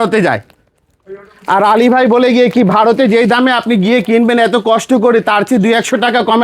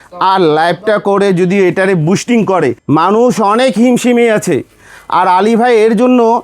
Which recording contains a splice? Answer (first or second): second